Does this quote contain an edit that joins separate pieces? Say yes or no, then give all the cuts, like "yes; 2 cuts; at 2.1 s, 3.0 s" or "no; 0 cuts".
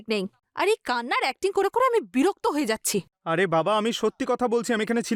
no; 0 cuts